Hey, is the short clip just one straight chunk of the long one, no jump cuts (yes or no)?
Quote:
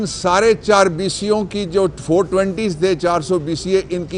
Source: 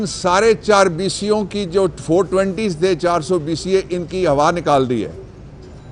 yes